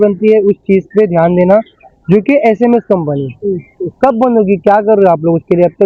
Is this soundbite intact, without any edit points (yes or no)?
yes